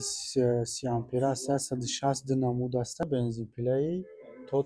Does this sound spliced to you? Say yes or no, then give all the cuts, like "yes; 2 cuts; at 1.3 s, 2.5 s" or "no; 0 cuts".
yes; 1 cut; at 3.0 s